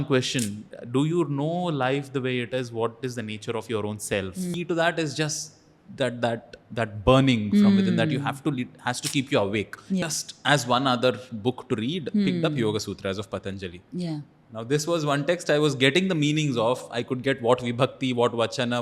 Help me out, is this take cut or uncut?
cut